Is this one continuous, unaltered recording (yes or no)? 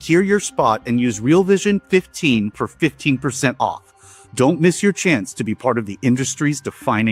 yes